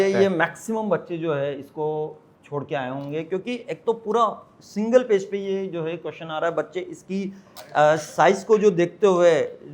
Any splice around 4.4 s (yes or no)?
no